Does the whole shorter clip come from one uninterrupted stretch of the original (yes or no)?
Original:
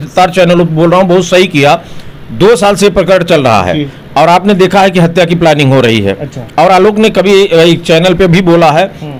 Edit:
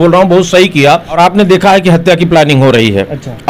no